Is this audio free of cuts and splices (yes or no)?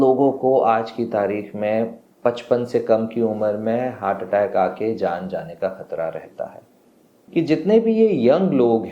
no